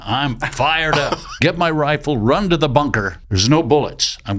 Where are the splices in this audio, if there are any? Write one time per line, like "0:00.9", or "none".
0:01.3
0:03.2